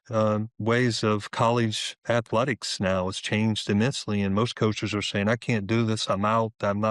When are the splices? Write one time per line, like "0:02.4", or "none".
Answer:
none